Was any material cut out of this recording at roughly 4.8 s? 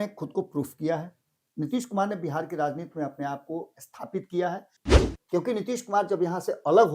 yes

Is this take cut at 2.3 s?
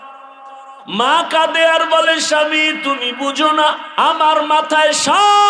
no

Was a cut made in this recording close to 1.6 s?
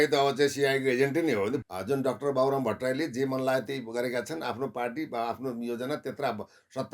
yes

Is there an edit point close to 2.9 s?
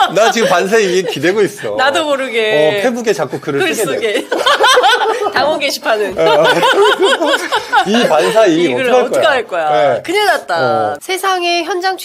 no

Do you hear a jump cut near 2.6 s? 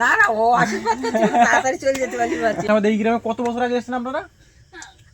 yes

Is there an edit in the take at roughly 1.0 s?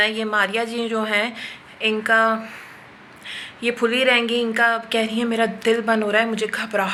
no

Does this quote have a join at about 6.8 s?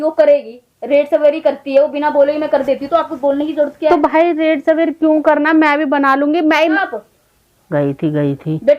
yes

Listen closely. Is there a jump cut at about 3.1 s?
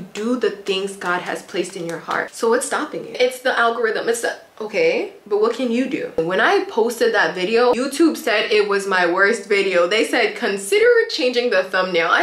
yes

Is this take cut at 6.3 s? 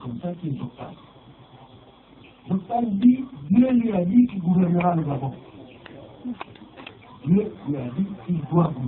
yes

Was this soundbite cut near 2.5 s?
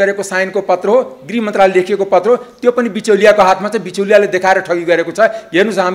no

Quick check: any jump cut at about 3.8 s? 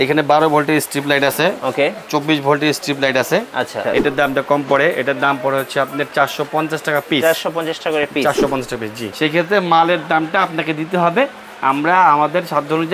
yes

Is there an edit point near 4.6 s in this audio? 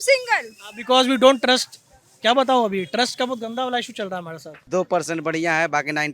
yes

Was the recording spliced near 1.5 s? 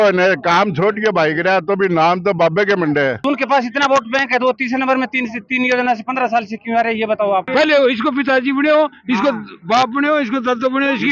no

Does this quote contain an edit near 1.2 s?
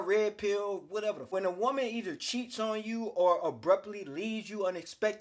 yes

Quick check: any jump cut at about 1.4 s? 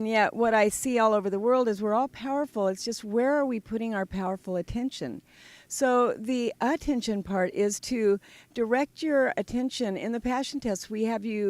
no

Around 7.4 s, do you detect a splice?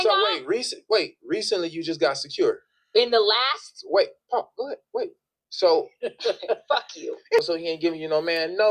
yes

